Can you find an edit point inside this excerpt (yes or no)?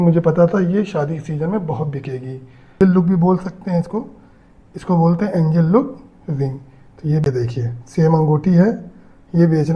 yes